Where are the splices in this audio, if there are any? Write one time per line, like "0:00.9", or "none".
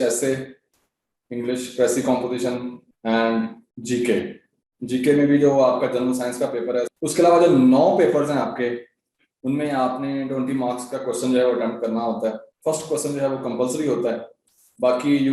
0:06.9
0:12.5